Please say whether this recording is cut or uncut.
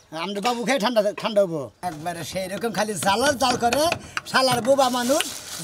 cut